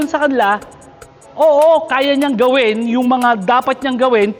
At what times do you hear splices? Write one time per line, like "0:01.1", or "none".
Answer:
none

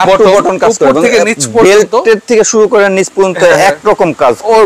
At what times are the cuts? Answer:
none

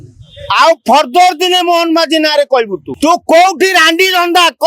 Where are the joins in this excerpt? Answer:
0:02.8

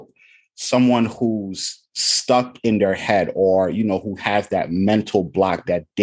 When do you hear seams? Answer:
none

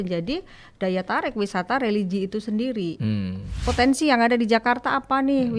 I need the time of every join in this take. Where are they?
0:03.5

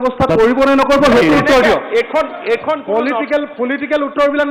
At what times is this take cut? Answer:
none

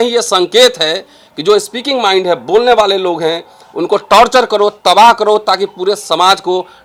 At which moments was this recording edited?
none

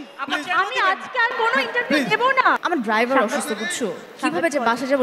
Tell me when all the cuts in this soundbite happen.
0:02.6

